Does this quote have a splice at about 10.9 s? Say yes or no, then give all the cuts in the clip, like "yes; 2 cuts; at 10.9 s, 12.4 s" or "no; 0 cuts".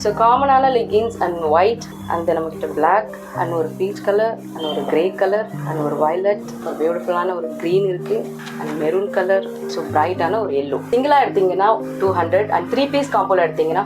yes; 8 cuts; at 1.9 s, 3.2 s, 4.5 s, 5.6 s, 6.6 s, 8.4 s, 9.6 s, 10.9 s